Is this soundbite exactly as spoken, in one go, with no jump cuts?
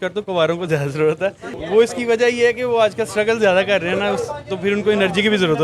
no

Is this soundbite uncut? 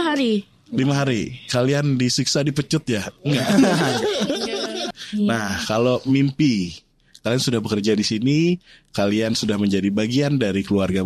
no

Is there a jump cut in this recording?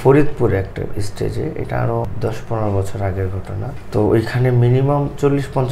yes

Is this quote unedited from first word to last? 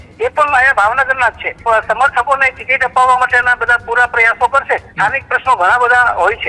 no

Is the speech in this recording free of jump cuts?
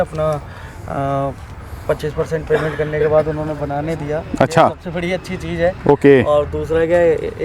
yes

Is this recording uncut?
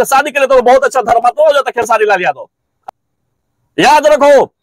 no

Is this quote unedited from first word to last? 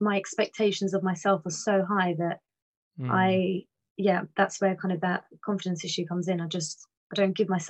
yes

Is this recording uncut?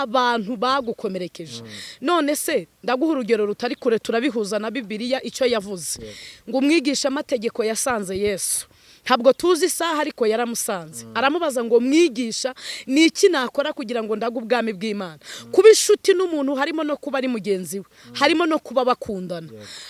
yes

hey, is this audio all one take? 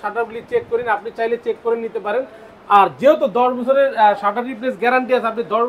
yes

